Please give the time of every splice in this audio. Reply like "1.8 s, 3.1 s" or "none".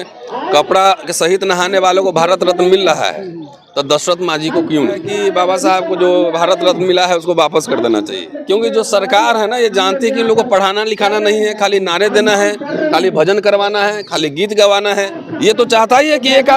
5.1 s, 8.3 s, 15.2 s